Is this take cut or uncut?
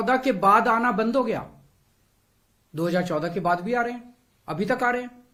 uncut